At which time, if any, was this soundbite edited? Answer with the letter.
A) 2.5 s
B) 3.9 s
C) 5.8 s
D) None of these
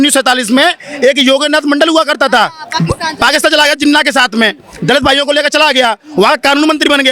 D